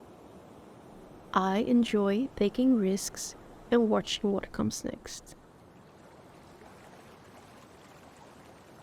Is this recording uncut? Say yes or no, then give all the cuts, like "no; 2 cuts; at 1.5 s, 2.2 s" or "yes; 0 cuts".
no; 2 cuts; at 1.1 s, 5.4 s